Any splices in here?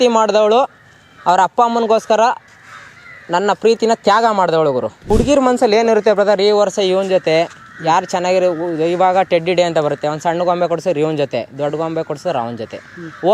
yes; 1 cut; at 5.0 s

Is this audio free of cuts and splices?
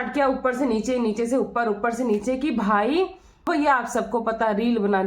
no; 1 cut; at 3.5 s

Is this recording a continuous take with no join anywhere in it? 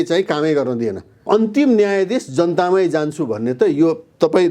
no; 1 cut; at 1.2 s

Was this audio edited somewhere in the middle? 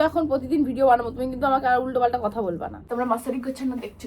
yes; 1 cut; at 2.8 s

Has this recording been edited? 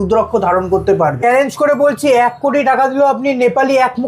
yes; 1 cut; at 1.2 s

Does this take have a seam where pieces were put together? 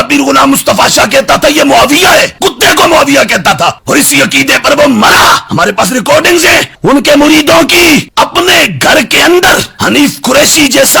yes; 1 cut; at 8.0 s

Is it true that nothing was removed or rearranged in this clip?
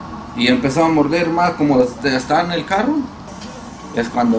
no; 1 cut; at 3.3 s

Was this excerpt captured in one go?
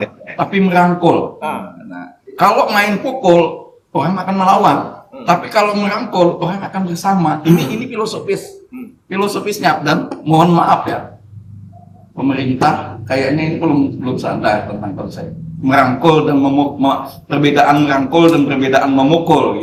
yes; 0 cuts

